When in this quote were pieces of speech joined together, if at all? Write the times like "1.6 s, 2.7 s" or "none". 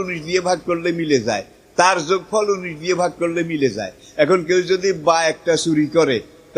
none